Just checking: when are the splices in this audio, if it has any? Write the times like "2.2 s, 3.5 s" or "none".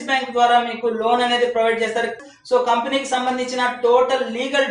2.2 s